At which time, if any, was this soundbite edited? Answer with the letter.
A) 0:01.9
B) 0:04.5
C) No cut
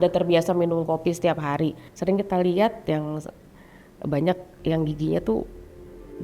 A